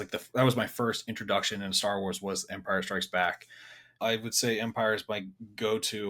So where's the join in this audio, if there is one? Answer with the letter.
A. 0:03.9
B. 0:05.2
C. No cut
A